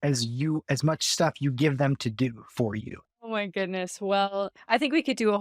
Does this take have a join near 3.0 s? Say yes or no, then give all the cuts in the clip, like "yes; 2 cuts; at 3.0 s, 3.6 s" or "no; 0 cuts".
yes; 1 cut; at 3.0 s